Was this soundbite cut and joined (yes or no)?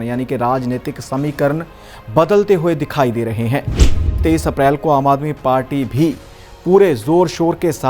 yes